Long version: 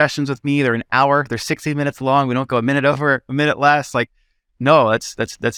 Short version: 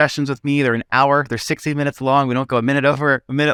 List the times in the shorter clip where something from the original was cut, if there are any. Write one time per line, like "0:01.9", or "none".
none